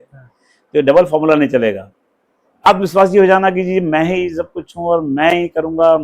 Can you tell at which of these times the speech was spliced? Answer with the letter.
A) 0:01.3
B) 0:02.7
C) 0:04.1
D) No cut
B